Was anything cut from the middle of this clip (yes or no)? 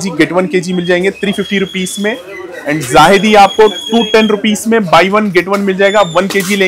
no